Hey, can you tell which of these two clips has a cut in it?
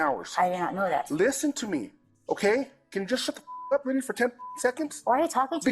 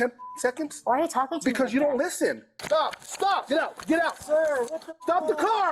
second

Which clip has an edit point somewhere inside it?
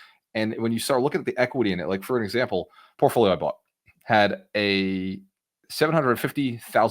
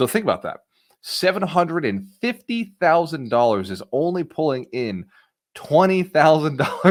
first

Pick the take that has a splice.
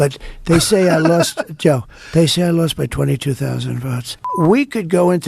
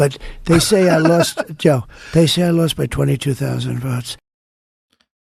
first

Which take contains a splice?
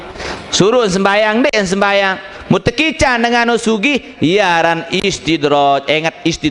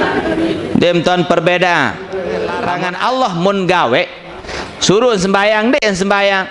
second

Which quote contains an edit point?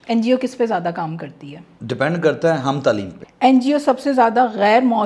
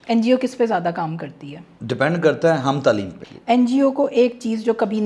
second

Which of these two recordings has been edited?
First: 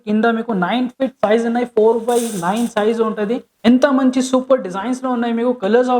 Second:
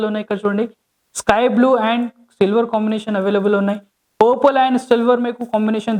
first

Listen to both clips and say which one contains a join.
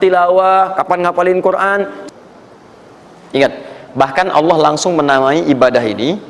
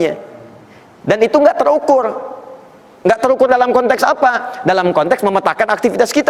first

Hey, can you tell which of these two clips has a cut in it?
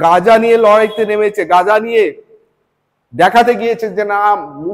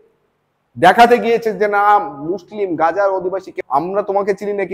second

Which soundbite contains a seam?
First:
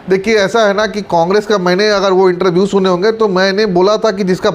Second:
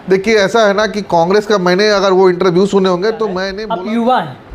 second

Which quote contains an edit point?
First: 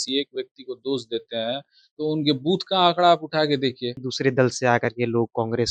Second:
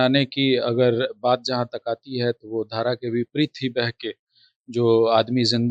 first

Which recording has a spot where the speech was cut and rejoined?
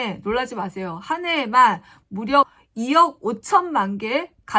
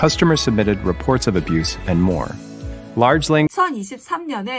second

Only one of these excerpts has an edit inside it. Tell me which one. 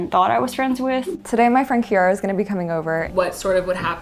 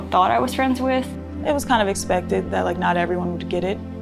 first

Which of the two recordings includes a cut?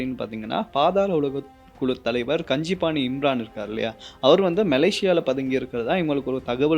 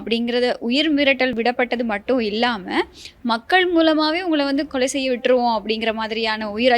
second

